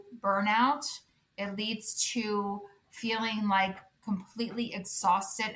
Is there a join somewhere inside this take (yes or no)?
no